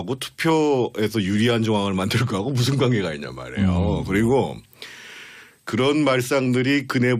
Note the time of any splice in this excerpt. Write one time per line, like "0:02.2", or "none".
none